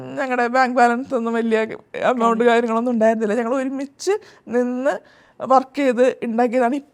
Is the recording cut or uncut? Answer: uncut